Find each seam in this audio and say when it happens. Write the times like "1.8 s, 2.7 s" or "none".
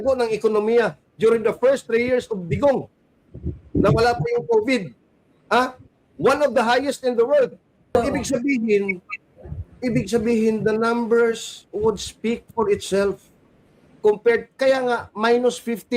7.9 s